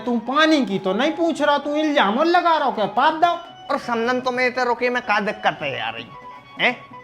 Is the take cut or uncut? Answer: cut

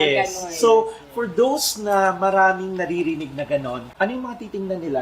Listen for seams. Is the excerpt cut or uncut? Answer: cut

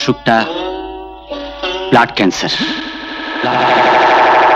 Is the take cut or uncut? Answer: uncut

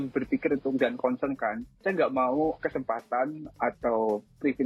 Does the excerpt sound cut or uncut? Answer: uncut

